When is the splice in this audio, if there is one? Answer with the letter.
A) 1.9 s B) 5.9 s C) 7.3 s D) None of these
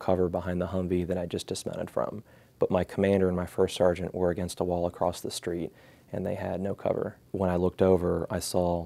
C